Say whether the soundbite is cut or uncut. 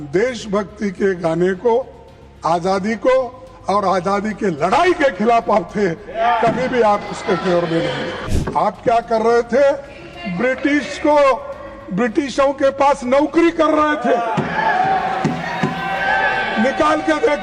cut